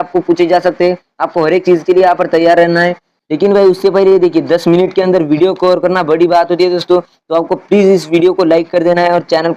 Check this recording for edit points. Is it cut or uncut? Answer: cut